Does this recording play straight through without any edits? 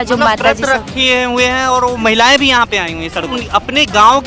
no; 1 cut; at 3.4 s

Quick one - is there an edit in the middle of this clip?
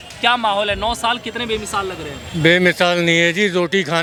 no; 0 cuts

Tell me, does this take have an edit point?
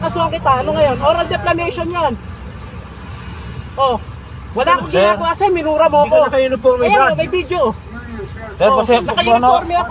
yes; 1 cut; at 6.6 s

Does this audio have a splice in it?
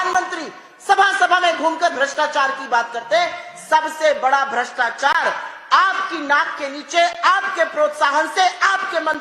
no; 0 cuts

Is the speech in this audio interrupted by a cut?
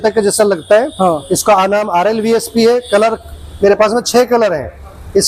no; 0 cuts

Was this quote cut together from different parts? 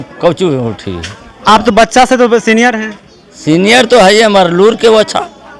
no; 0 cuts

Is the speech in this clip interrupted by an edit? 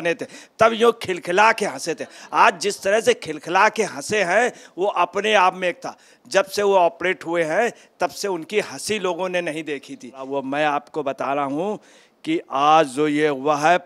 yes; 1 cut; at 10.2 s

